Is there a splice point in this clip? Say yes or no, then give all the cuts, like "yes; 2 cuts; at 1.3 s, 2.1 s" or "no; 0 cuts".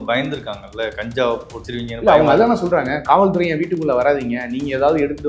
yes; 1 cut; at 1.6 s